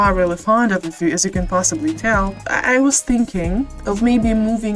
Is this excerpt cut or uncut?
cut